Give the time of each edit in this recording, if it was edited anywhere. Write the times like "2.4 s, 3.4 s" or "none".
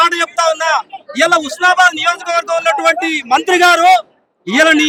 none

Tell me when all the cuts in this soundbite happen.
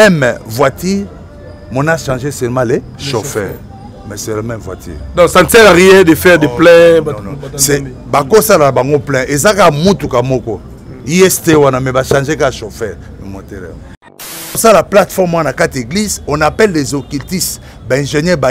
14.4 s

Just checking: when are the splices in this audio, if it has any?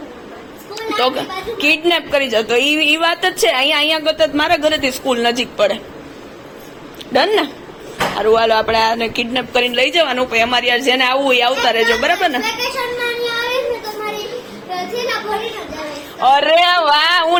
none

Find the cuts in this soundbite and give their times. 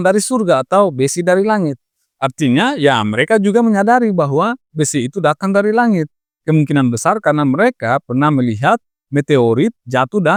none

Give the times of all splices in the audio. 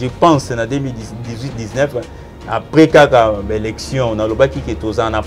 none

